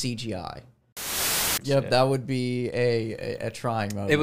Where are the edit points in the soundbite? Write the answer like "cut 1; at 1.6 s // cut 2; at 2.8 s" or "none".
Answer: cut 1; at 1.2 s